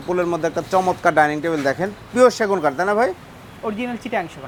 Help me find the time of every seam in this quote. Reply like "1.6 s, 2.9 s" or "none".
none